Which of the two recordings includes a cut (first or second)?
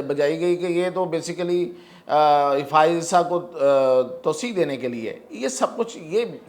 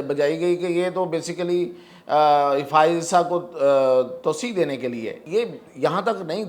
second